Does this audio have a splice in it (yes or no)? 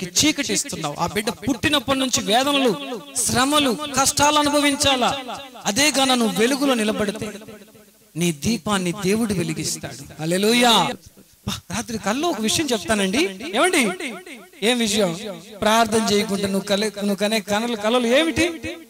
yes